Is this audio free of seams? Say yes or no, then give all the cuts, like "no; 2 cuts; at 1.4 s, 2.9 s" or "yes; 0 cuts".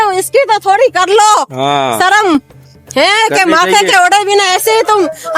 yes; 0 cuts